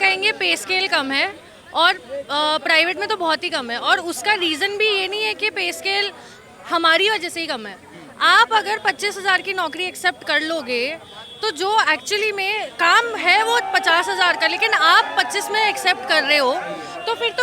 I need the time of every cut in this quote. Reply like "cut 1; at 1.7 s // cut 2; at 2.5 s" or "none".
none